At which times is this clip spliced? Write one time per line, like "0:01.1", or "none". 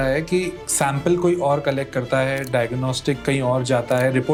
none